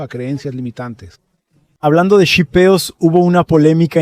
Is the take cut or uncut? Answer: cut